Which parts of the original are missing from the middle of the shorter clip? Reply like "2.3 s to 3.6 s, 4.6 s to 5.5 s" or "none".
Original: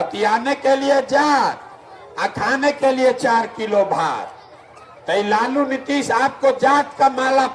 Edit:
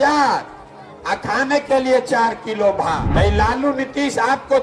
4.2 s to 5.0 s